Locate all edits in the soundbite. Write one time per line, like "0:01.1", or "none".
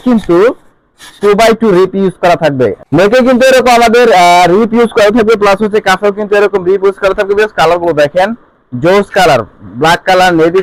none

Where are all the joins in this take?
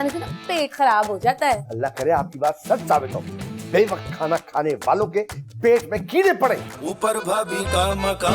0:06.8

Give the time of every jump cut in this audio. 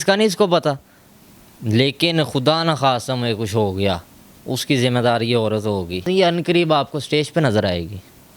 0:01.4
0:06.0

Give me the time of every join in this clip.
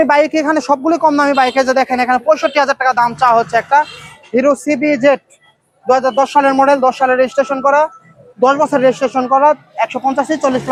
none

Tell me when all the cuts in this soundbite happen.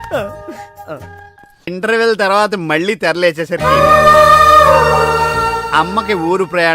0:01.7

